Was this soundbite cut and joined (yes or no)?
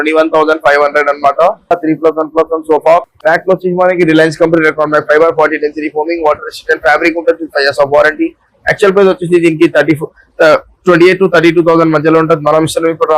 yes